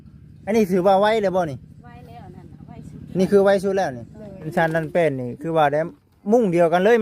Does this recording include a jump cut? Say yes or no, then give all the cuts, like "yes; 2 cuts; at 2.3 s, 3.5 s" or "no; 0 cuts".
yes; 1 cut; at 4.5 s